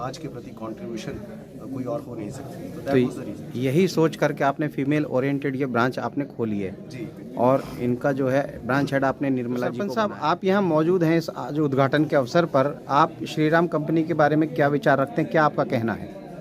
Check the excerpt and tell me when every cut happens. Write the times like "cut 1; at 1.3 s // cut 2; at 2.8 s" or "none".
cut 1; at 9.9 s